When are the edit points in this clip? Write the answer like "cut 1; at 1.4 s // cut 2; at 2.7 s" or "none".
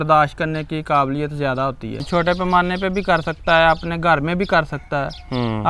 cut 1; at 2.0 s